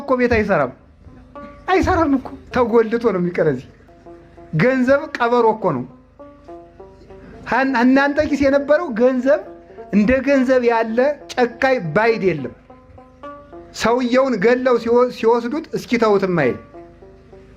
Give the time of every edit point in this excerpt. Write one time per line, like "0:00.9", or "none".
none